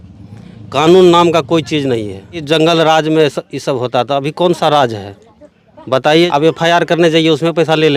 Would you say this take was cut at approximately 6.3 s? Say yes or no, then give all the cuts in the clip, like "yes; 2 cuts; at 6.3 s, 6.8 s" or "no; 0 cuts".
yes; 2 cuts; at 2.4 s, 6.3 s